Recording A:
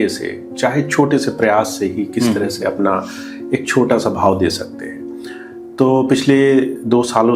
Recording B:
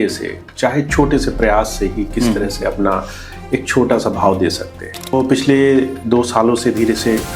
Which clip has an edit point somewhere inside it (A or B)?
B